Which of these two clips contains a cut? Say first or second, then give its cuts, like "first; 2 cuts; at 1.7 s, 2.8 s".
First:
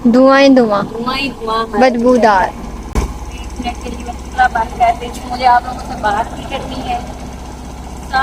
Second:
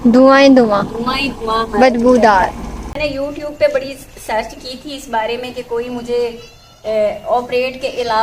second; 1 cut; at 2.9 s